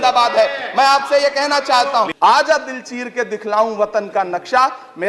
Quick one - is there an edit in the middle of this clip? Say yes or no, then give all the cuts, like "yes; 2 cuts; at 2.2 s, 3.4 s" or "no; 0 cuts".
yes; 1 cut; at 2.1 s